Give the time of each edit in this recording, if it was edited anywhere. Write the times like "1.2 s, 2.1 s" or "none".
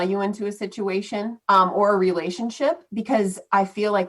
1.4 s